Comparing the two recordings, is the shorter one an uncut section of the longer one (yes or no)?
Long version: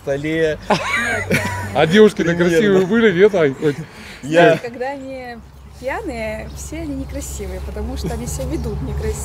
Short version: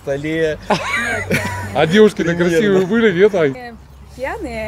no